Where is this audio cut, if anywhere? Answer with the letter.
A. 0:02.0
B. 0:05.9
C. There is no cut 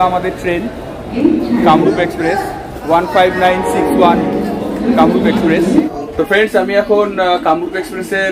B